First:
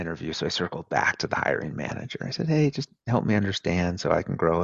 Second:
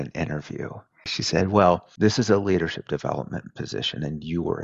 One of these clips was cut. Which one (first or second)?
second